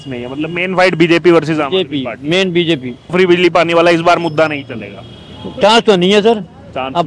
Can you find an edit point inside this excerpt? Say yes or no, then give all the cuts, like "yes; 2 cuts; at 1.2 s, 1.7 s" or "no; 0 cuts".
yes; 1 cut; at 3.1 s